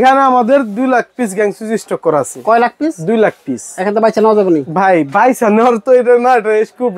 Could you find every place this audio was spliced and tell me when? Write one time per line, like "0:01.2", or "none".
none